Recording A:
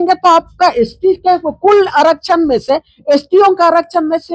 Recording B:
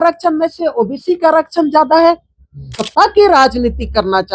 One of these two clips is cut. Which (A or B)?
B